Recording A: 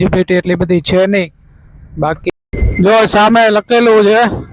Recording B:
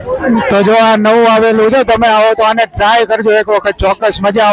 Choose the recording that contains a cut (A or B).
A